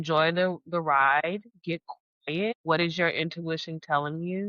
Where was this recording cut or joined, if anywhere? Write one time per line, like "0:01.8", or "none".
0:02.5